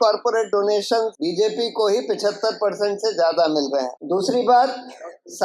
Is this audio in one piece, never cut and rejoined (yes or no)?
no